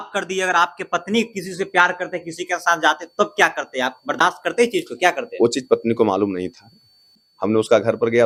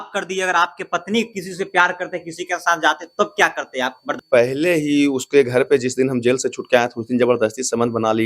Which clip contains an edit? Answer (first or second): second